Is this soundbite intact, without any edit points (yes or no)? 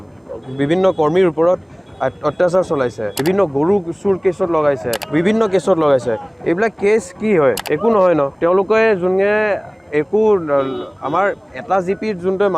no